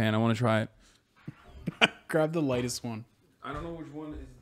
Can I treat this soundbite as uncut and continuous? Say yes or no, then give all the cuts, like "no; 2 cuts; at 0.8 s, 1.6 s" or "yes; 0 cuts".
yes; 0 cuts